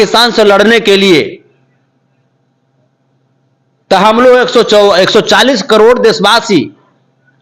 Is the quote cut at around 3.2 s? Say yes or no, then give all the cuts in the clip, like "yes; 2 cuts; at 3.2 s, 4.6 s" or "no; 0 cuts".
no; 0 cuts